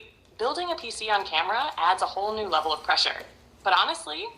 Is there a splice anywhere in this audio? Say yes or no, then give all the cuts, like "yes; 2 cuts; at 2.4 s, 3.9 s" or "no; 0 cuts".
yes; 2 cuts; at 1.3 s, 3.2 s